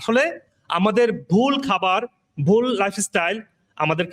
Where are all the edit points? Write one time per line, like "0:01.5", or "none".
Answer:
none